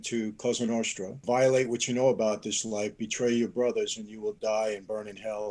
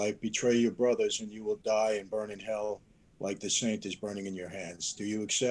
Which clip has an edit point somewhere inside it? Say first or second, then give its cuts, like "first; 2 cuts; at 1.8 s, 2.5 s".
first; 1 cut; at 1.2 s